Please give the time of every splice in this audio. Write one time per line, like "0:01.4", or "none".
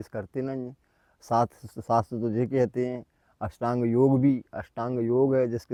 none